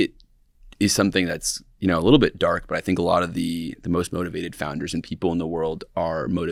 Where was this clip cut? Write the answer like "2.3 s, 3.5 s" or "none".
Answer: none